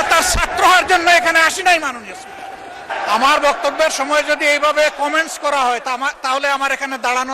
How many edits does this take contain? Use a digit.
1